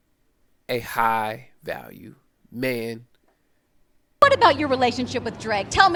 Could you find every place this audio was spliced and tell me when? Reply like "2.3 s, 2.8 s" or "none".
none